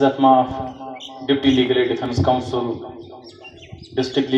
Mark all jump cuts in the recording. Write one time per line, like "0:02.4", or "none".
none